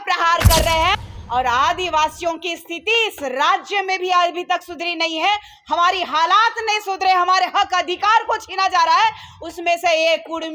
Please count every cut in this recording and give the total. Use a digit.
1